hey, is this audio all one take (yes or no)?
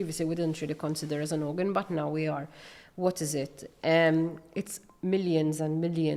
yes